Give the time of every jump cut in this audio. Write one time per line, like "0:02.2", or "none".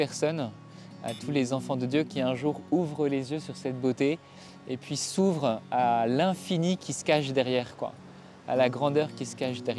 none